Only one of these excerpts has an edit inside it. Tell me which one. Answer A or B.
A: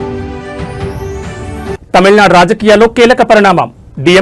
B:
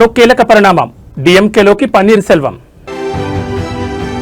A